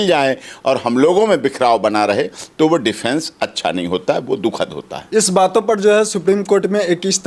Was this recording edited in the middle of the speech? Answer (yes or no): no